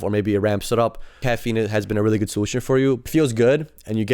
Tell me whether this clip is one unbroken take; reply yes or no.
no